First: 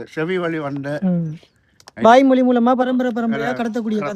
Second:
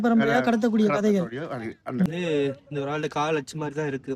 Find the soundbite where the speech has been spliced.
second; 1 cut; at 2.1 s

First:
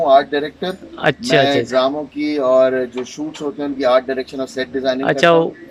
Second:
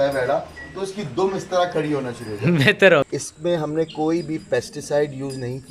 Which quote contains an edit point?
second; 1 cut; at 3.1 s

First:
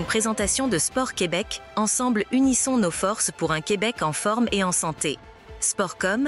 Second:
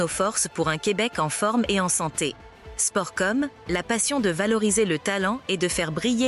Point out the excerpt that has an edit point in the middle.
first; 1 cut; at 1.6 s

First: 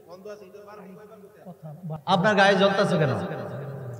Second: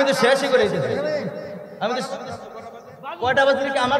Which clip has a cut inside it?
first; 1 cut; at 2.0 s

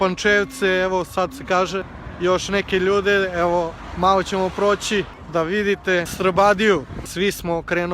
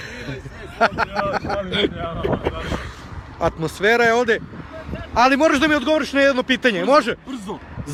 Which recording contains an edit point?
first; 4 cuts; at 2.0 s, 5.2 s, 6.1 s, 7.0 s

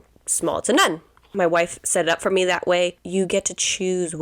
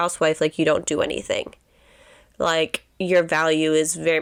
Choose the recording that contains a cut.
first; 2 cuts; at 1.3 s, 3.0 s

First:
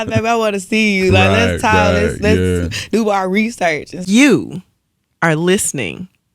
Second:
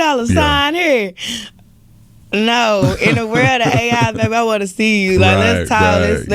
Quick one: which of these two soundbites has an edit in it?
first; 1 cut; at 4.0 s

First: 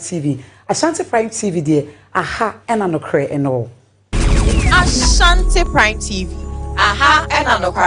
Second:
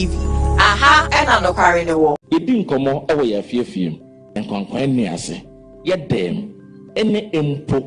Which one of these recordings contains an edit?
second; 1 cut; at 2.2 s

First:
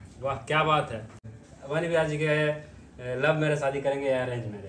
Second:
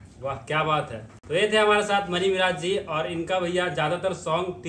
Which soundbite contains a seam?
first; 1 cut; at 1.1 s

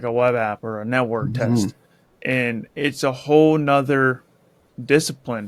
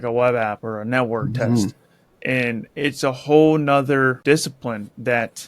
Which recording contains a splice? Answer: second; 1 cut; at 4.2 s

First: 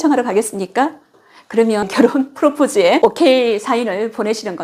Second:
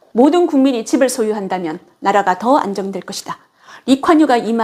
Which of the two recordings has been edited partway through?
first; 1 cut; at 3.0 s

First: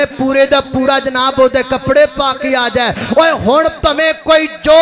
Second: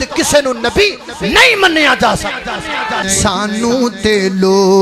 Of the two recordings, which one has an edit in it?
second; 1 cut; at 3.0 s

